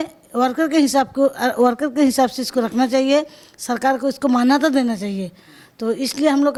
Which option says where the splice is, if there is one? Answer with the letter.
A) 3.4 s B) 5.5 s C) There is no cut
C